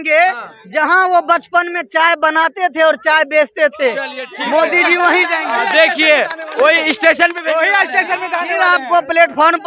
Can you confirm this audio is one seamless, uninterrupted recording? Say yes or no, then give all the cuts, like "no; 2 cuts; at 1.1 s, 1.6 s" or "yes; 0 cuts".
yes; 0 cuts